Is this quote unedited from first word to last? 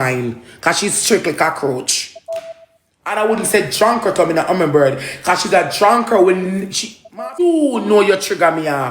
no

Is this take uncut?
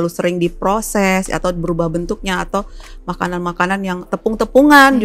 no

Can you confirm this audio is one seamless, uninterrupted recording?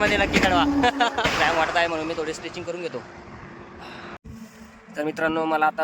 no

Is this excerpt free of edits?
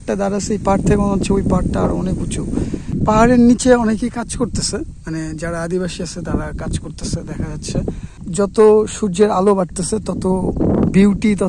no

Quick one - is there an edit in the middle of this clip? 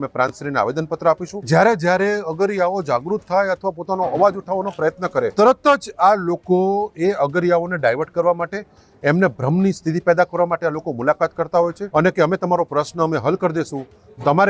yes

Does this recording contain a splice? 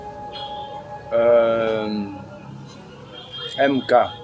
yes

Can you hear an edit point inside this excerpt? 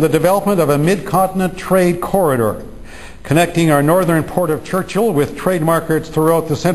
yes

